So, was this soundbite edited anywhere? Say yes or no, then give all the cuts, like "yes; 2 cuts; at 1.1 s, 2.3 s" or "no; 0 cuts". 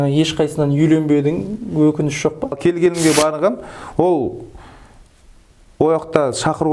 yes; 1 cut; at 2.6 s